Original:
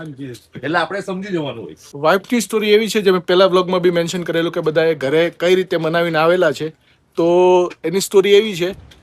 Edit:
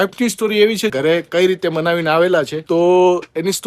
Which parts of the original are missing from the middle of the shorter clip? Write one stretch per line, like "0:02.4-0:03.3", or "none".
0:03.0-0:05.0
0:06.7-0:07.1